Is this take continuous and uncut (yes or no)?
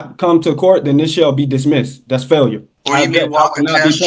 no